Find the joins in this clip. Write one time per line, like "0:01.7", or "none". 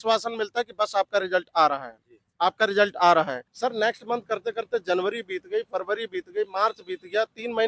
0:03.4